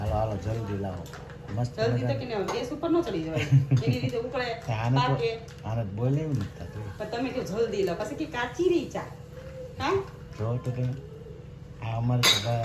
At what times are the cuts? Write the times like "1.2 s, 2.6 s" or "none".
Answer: none